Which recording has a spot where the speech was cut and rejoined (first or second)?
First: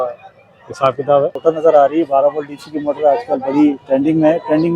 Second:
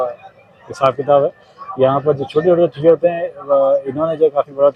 first